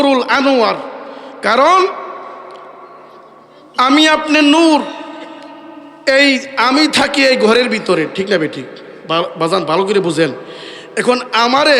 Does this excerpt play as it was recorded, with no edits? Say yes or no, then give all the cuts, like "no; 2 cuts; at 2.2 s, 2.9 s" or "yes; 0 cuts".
yes; 0 cuts